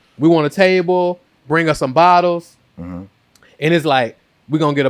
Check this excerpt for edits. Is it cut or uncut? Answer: uncut